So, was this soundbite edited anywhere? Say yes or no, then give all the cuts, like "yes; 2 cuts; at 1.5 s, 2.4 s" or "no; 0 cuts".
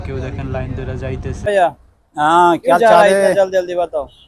yes; 1 cut; at 1.4 s